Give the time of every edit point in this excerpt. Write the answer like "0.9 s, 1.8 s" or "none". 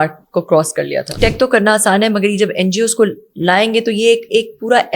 1.1 s

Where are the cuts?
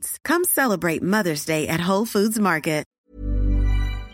3.0 s

